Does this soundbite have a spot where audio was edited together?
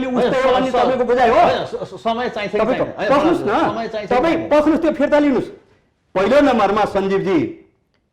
no; 0 cuts

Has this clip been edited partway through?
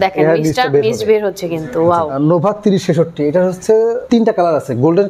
yes; 2 cuts; at 2.1 s, 4.0 s

